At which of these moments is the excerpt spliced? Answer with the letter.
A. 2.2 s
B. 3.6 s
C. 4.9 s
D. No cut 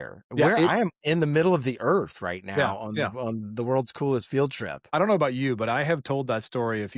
C